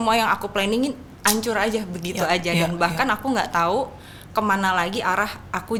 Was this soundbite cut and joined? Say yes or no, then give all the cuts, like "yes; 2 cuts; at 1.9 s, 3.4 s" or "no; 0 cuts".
no; 0 cuts